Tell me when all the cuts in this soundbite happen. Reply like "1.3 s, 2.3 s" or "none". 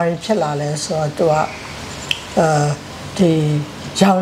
none